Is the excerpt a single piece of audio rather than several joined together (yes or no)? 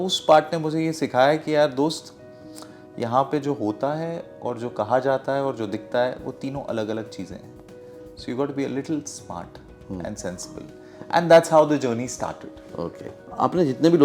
yes